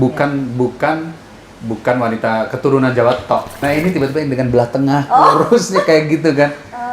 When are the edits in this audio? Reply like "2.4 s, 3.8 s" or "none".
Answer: 3.6 s